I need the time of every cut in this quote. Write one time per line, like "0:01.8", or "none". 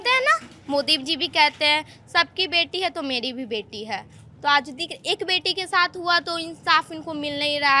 none